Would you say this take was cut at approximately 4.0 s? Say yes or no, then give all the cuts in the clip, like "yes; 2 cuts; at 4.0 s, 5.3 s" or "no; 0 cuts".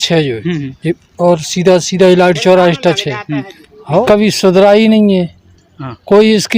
yes; 1 cut; at 4.0 s